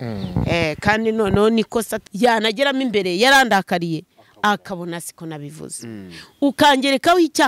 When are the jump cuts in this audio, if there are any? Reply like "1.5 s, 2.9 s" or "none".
2.0 s